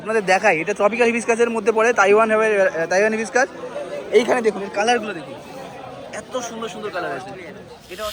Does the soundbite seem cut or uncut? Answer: uncut